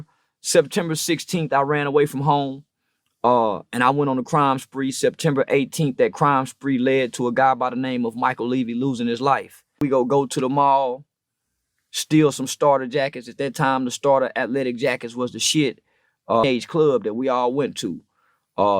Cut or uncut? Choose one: cut